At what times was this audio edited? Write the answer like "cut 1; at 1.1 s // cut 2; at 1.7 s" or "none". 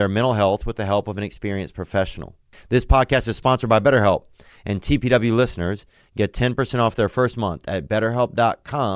cut 1; at 2.5 s